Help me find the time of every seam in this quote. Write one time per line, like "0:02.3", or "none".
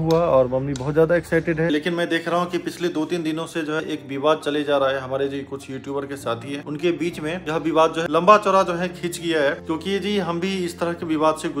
0:01.7
0:03.8
0:07.4
0:09.6